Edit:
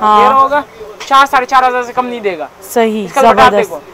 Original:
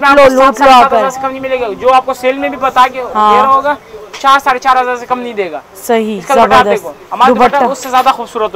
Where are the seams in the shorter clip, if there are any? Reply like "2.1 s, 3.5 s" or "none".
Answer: none